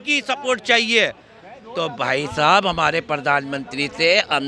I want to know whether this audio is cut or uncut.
uncut